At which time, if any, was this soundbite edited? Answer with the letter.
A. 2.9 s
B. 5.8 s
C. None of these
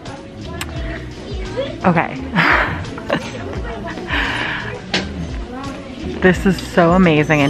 C